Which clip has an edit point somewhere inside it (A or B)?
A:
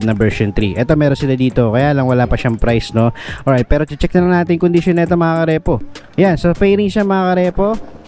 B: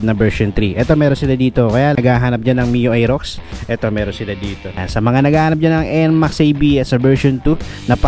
B